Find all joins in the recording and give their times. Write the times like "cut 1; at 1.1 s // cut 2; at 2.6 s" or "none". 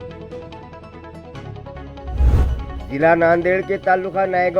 none